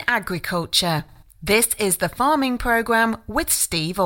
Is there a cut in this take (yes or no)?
no